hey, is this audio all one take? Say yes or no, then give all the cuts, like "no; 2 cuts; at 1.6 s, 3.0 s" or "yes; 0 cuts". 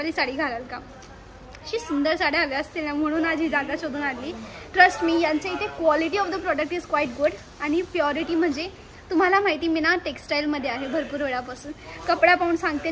yes; 0 cuts